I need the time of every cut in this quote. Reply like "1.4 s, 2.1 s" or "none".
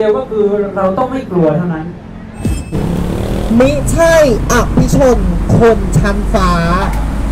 2.8 s